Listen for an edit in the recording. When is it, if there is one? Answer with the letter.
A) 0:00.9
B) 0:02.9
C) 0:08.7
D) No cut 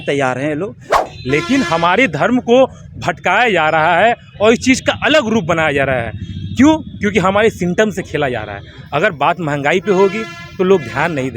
A